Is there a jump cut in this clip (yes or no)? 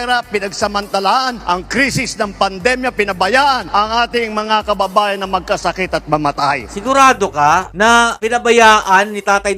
no